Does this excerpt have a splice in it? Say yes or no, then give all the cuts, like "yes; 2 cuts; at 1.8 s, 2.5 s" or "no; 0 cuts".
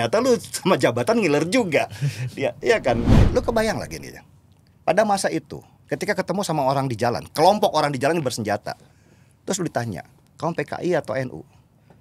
yes; 1 cut; at 3.2 s